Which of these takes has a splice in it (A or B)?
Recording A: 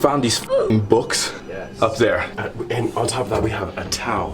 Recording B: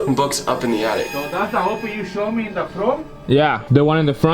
B